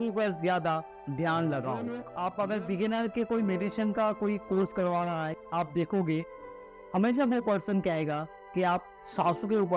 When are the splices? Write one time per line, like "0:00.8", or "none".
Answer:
0:02.0